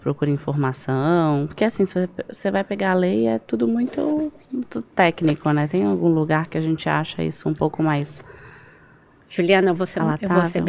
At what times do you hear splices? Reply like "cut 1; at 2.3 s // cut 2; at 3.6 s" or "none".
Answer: none